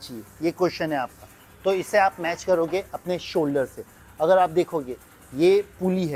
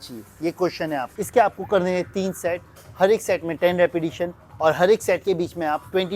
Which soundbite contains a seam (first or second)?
second